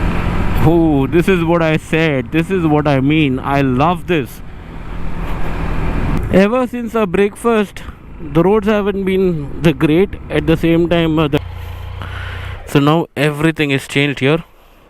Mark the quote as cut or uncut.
cut